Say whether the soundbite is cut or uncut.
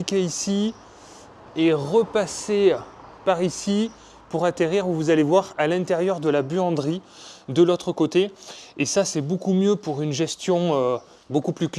uncut